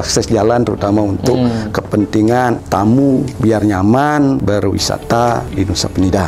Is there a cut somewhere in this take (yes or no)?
yes